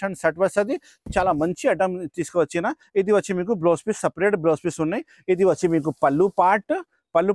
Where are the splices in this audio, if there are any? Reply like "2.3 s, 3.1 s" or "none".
1.0 s